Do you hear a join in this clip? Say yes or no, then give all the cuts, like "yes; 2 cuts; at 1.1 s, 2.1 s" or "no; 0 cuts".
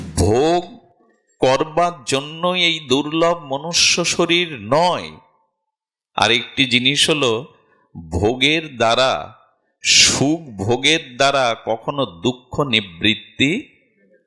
no; 0 cuts